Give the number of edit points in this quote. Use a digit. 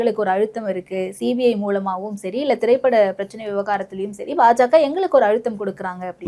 0